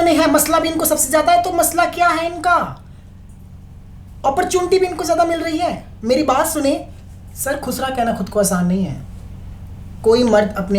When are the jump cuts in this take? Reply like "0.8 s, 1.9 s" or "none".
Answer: none